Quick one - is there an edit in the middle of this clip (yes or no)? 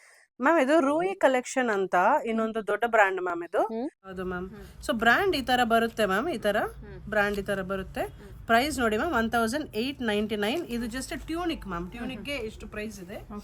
yes